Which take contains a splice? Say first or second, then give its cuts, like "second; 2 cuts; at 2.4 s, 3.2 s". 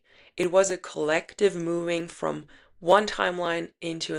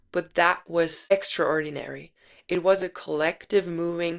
second; 1 cut; at 1.1 s